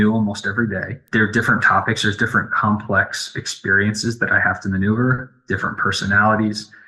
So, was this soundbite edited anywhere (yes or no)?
yes